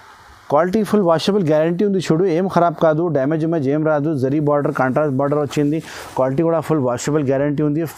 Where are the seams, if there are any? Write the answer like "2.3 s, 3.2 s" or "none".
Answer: none

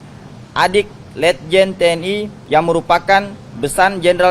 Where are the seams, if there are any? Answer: 2.3 s

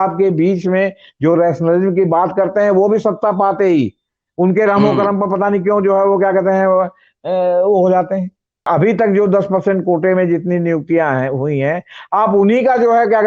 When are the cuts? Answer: 8.7 s

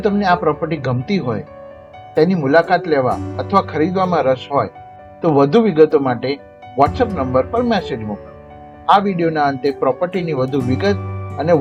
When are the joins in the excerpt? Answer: none

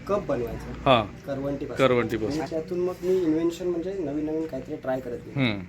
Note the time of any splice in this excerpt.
2.3 s

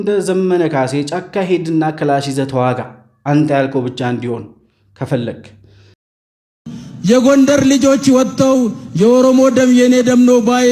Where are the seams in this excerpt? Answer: 6.0 s

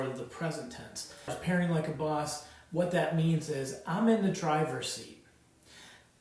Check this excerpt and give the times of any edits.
1.3 s

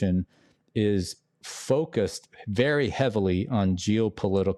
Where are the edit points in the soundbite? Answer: none

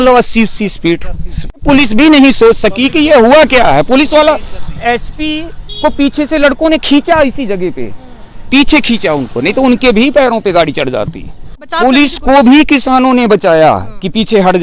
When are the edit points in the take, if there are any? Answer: 1.6 s, 11.7 s

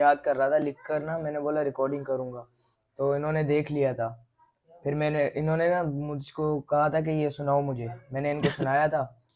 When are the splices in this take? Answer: none

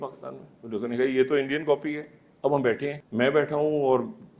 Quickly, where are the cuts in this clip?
3.0 s

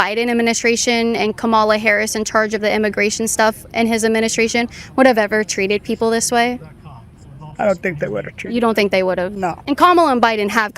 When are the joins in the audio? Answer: 9.6 s

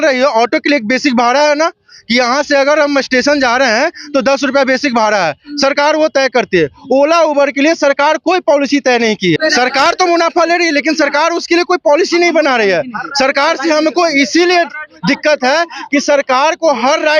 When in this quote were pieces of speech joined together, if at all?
9.4 s

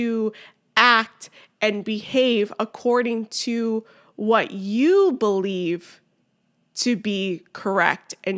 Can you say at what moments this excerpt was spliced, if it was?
none

